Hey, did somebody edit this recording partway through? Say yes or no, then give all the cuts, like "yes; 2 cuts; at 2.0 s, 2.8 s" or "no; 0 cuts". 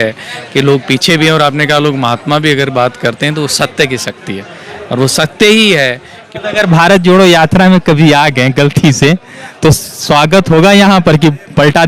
yes; 1 cut; at 6.3 s